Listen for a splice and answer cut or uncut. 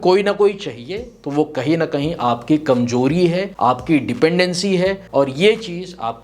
cut